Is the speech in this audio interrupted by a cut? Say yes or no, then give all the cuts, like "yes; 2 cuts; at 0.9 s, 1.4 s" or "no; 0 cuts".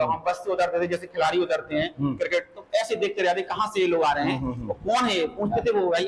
no; 0 cuts